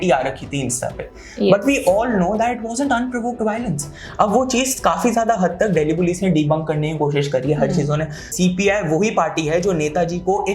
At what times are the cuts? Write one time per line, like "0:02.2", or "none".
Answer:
0:08.3